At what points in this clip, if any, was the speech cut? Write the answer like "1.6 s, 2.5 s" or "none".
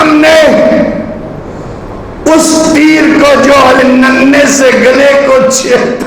3.8 s